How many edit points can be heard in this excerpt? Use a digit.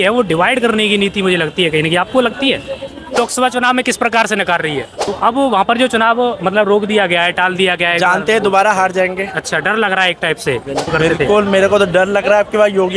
3